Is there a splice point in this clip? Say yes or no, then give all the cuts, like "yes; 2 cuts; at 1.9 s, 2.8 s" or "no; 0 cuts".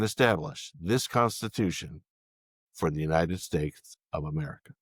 no; 0 cuts